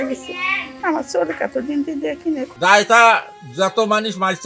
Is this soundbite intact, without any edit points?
no; 1 cut; at 2.5 s

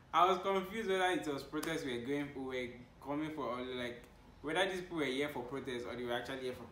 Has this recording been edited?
no; 0 cuts

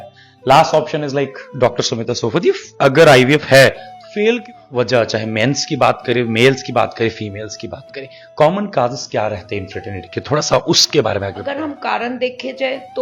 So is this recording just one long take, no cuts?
no; 2 cuts; at 4.4 s, 11.6 s

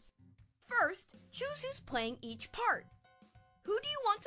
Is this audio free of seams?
yes; 0 cuts

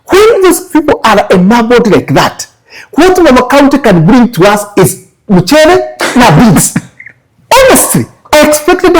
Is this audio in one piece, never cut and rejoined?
yes; 0 cuts

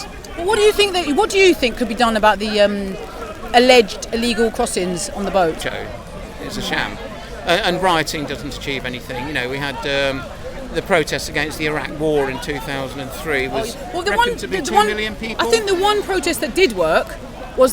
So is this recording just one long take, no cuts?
no; 1 cut; at 5.6 s

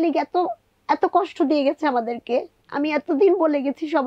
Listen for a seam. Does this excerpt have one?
yes; 1 cut; at 2.6 s

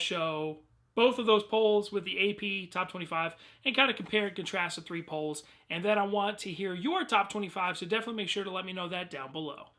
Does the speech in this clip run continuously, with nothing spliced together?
yes; 0 cuts

